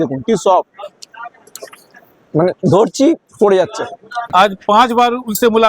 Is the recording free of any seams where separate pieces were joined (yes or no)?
no